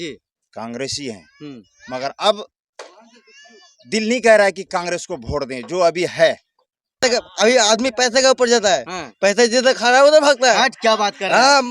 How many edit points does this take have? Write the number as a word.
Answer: one